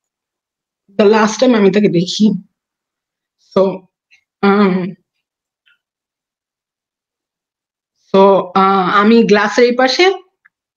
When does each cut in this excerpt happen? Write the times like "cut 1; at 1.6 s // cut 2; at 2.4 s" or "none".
none